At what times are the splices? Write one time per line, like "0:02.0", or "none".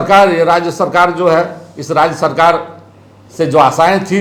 none